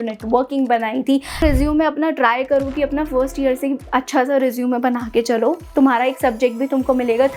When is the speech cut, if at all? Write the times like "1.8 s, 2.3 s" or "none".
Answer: 1.4 s